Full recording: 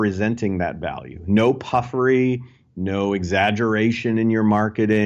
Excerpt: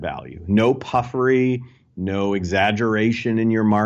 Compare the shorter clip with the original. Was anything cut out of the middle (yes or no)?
no